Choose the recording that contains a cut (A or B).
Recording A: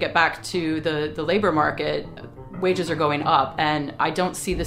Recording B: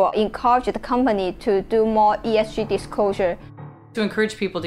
B